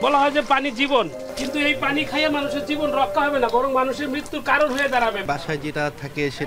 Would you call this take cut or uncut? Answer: cut